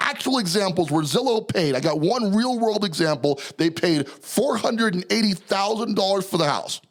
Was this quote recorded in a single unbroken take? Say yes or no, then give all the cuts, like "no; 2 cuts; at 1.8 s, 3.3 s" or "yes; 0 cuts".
yes; 0 cuts